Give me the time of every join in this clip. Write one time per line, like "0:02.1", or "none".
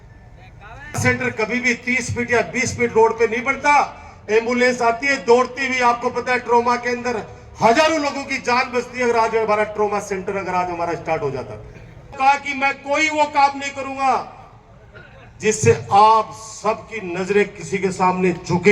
0:01.0
0:12.1